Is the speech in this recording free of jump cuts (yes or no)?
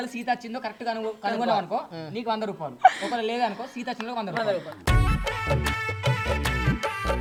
yes